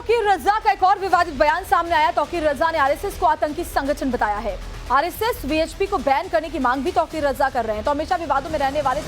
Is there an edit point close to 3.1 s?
yes; 1 cut; at 3.1 s

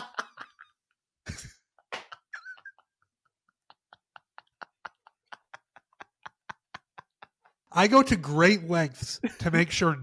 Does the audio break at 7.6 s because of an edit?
yes; 1 cut; at 7.6 s

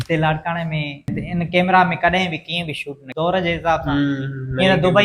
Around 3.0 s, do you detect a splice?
yes; 2 cuts; at 1.2 s, 3.0 s

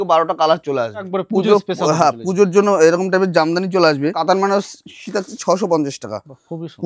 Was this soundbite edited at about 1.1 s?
yes; 2 cuts; at 1.1 s, 4.2 s

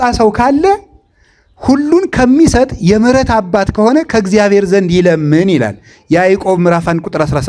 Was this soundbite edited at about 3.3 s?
no; 0 cuts

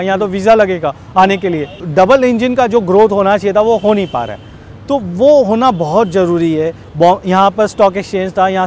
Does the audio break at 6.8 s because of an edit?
yes; 2 cuts; at 1.8 s, 6.8 s

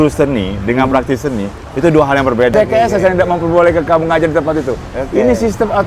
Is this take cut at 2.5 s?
yes; 1 cut; at 2.5 s

